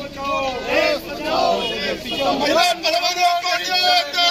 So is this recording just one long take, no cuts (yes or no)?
yes